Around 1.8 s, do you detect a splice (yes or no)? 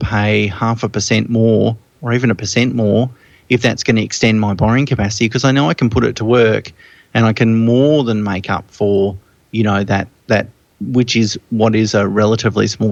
no